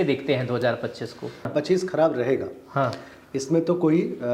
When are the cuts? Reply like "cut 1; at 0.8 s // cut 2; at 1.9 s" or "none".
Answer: cut 1; at 1.5 s